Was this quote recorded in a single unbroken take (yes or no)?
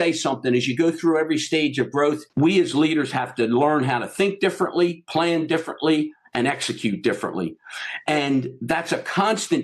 no